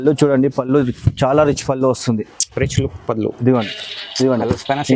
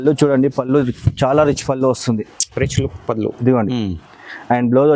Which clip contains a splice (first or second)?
first